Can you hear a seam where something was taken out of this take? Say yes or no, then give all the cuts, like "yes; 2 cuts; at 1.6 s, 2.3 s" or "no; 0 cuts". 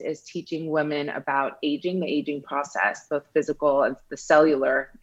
no; 0 cuts